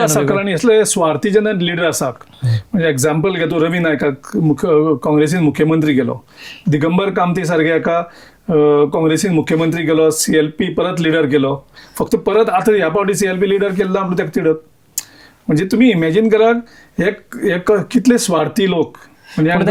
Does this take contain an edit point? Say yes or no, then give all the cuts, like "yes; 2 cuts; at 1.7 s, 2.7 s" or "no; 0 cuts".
no; 0 cuts